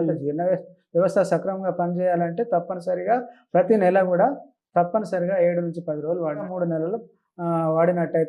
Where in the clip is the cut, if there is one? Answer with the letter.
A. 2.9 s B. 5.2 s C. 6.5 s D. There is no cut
C